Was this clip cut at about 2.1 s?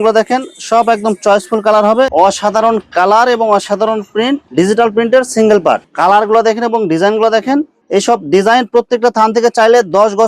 yes; 2 cuts; at 2.1 s, 5.9 s

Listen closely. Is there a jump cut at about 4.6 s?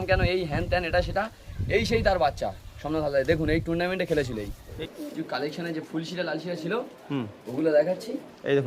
yes; 1 cut; at 4.6 s

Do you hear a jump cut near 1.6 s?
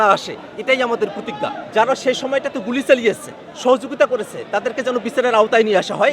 yes; 1 cut; at 1.6 s

